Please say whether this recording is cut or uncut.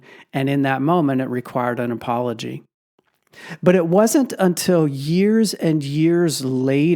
cut